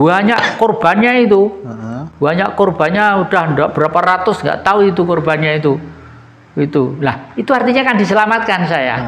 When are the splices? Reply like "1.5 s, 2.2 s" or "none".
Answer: none

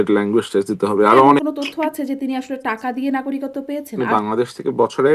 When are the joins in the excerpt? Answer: 1.4 s, 3.9 s

